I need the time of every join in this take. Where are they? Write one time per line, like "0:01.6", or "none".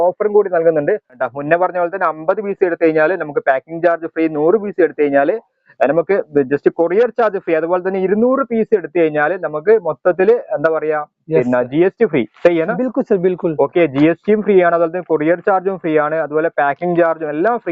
0:01.1